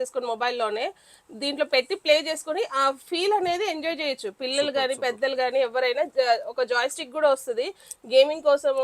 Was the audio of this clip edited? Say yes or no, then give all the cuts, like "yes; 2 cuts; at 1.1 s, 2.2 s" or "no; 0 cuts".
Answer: no; 0 cuts